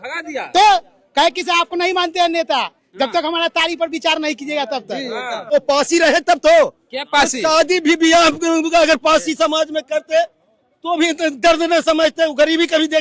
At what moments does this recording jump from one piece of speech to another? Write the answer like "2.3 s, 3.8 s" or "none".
5.4 s